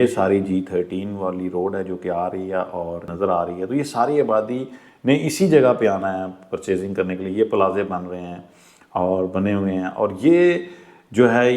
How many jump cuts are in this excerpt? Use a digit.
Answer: 1